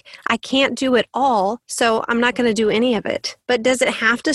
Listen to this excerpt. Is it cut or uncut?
cut